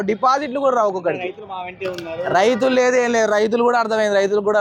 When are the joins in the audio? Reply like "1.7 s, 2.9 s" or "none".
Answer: none